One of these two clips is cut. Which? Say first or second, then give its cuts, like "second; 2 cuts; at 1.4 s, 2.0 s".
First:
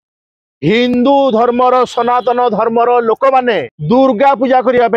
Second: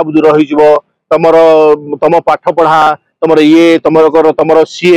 first; 1 cut; at 3.7 s